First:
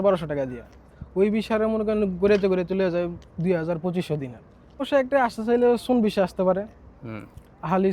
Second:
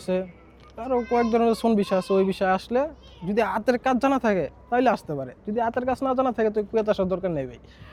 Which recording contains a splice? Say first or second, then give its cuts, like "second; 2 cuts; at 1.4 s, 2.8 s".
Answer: first; 1 cut; at 4.8 s